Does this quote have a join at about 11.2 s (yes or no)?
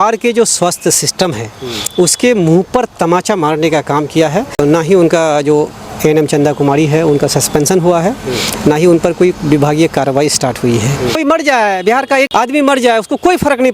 yes